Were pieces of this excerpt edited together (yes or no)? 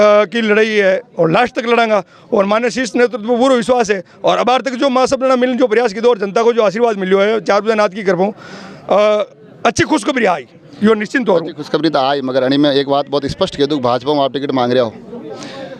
no